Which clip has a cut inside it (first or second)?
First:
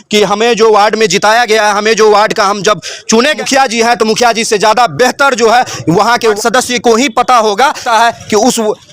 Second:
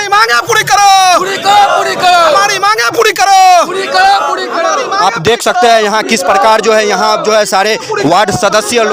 first